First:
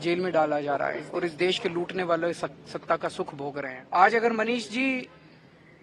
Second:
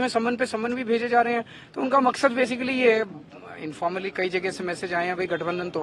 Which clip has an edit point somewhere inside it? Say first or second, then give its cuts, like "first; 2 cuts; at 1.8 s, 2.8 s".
first; 2 cuts; at 1.0 s, 3.8 s